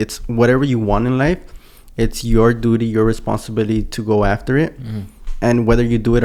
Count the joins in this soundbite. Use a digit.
0